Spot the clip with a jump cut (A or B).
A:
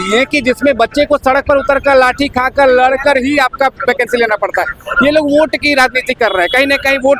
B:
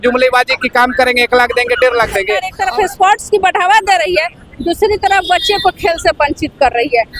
B